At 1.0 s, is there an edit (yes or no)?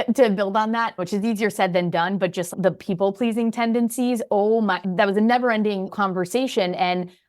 yes